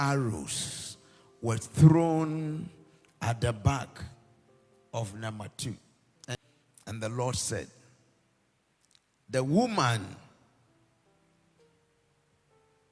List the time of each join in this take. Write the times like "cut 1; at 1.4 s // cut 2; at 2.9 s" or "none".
cut 1; at 6.4 s